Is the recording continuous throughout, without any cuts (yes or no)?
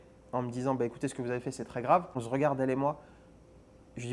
no